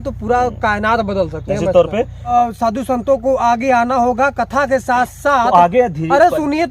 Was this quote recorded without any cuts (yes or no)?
no